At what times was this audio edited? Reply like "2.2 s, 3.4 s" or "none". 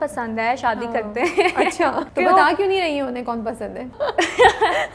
2.0 s, 3.9 s